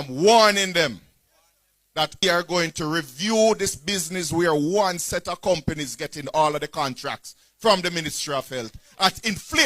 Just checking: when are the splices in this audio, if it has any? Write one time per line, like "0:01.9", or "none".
0:02.2